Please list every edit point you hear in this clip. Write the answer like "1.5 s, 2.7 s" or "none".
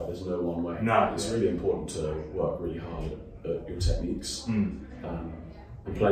1.2 s